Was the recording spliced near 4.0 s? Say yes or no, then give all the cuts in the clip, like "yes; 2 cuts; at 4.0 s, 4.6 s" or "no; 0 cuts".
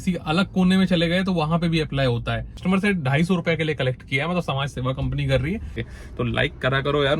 no; 2 cuts; at 2.6 s, 5.8 s